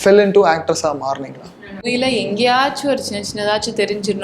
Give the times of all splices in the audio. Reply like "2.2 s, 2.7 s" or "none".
1.8 s